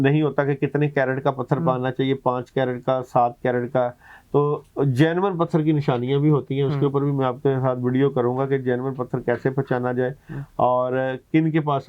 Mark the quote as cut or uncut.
uncut